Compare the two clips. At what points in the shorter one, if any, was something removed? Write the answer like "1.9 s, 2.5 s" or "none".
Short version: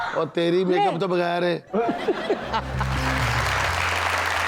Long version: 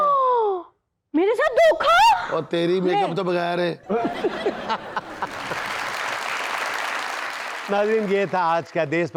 3.0 s